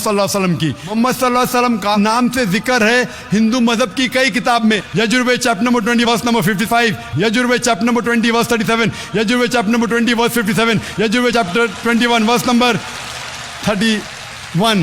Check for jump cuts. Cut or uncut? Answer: cut